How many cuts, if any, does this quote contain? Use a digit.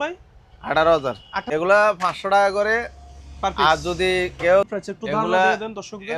2